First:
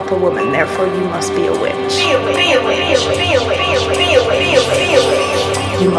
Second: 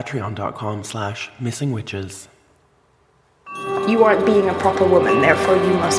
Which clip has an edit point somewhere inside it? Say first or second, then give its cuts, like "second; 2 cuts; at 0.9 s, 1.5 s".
second; 1 cut; at 3.6 s